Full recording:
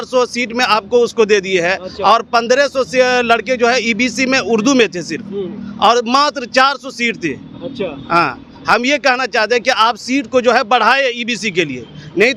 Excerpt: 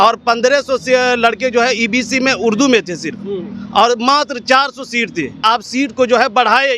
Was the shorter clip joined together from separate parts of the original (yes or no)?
yes